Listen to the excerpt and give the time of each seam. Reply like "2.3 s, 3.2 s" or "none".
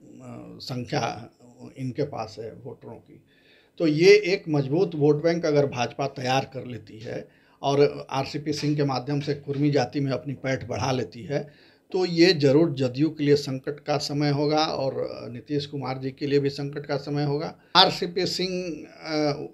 17.7 s